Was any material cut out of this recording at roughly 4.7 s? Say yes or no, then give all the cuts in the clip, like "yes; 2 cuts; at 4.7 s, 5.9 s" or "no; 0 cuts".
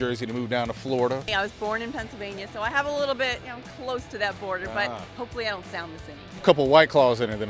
no; 2 cuts; at 1.3 s, 6.4 s